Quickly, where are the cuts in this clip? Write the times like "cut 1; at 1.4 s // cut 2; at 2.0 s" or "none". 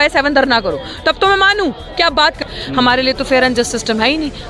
cut 1; at 2.6 s